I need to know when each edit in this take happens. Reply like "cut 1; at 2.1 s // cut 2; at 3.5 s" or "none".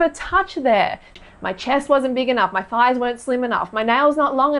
cut 1; at 1.1 s